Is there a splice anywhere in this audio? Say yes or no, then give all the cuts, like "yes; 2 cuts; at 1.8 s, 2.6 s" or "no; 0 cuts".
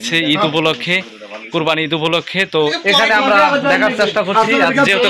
yes; 1 cut; at 2.8 s